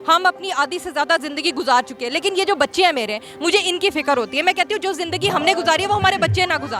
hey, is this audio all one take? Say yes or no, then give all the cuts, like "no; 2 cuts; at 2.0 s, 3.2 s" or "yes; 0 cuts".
yes; 0 cuts